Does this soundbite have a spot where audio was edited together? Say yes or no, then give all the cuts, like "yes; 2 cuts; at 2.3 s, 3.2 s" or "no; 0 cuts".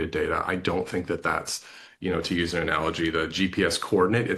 no; 0 cuts